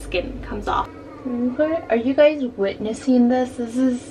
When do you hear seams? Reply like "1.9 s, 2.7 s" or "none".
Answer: 0.9 s